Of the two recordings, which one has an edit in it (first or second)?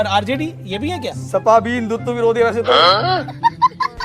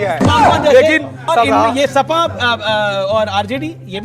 second